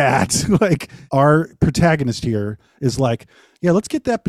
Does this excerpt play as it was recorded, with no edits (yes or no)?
no